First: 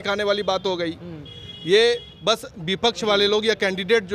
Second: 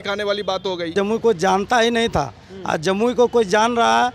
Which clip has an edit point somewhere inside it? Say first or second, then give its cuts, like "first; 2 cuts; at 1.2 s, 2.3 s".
second; 1 cut; at 0.9 s